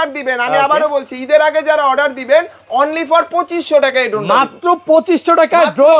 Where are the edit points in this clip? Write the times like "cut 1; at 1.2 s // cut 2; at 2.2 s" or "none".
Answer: none

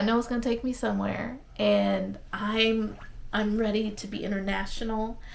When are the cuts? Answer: none

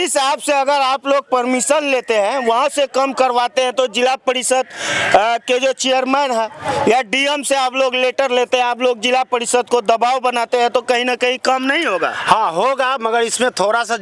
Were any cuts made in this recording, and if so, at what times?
none

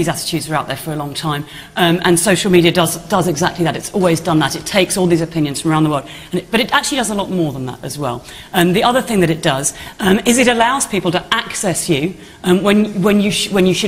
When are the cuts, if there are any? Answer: cut 1; at 6.3 s

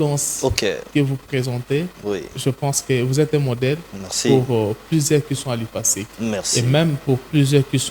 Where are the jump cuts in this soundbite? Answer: none

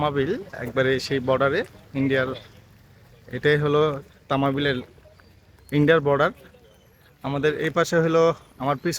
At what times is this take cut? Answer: none

